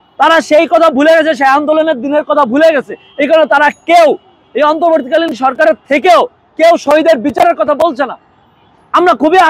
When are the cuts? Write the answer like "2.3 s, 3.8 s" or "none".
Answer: none